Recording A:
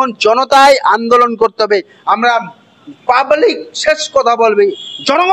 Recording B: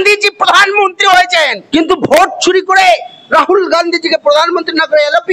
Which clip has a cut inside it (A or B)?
B